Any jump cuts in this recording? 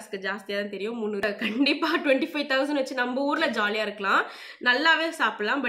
yes; 1 cut; at 1.2 s

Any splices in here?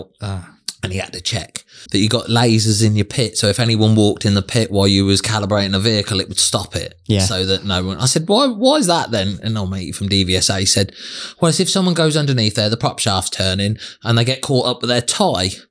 yes; 1 cut; at 1.8 s

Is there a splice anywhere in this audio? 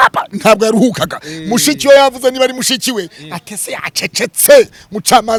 no; 0 cuts

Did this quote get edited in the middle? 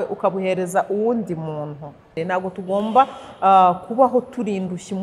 yes; 1 cut; at 2.1 s

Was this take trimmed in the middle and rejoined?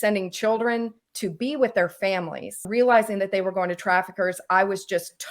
yes; 1 cut; at 2.6 s

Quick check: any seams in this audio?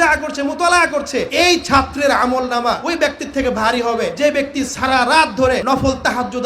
yes; 4 cuts; at 1.3 s, 2.8 s, 4.1 s, 5.6 s

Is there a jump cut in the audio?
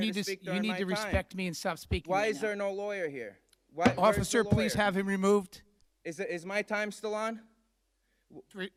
no; 0 cuts

